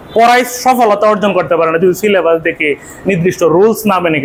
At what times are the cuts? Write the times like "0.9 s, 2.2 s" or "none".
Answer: none